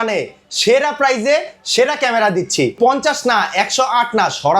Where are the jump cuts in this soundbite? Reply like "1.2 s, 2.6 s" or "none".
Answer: 2.8 s